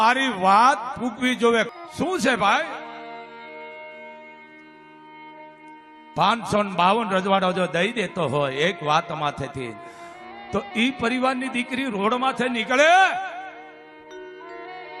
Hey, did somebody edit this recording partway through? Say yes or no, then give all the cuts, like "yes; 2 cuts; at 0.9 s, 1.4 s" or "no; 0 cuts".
yes; 1 cut; at 1.7 s